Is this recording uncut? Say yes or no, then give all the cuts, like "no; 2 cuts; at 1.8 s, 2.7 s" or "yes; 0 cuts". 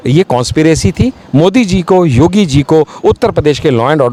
yes; 0 cuts